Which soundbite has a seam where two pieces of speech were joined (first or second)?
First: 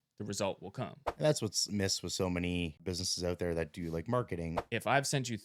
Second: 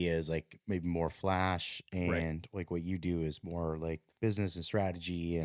first